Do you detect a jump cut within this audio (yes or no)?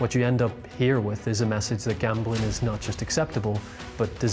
no